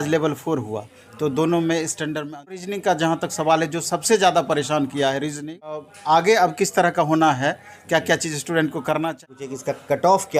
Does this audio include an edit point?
yes; 3 cuts; at 2.6 s, 5.9 s, 9.2 s

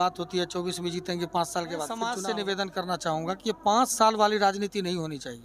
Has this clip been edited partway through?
yes; 1 cut; at 2.1 s

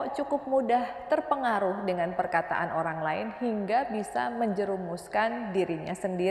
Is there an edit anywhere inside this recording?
no; 0 cuts

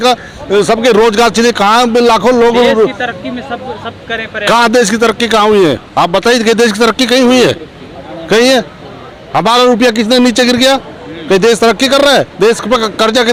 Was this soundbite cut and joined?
no; 0 cuts

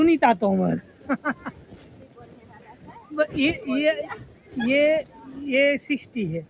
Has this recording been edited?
no; 0 cuts

